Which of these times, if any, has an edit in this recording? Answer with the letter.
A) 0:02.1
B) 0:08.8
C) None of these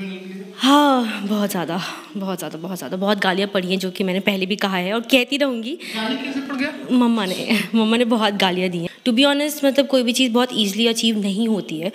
B